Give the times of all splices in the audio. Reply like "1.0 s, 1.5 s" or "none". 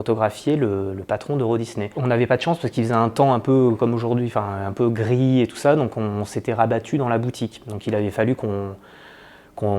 none

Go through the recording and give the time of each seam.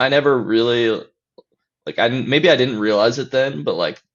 none

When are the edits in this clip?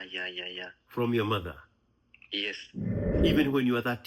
3.1 s

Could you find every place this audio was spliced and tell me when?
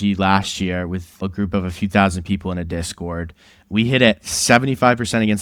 1.2 s, 3.5 s

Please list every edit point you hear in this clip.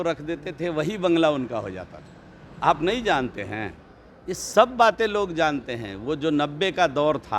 none

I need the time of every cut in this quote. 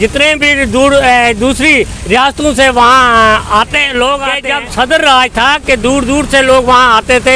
4.4 s

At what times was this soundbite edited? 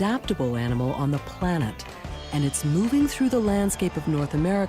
1.0 s

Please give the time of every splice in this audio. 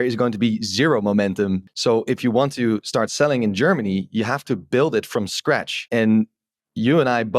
1.7 s, 5.7 s

